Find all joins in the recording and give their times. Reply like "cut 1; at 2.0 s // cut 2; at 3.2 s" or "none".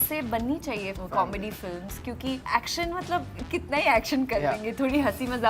cut 1; at 0.9 s // cut 2; at 2.4 s